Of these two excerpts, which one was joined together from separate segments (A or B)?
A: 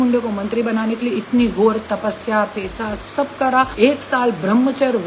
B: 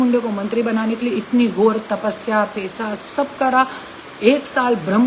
A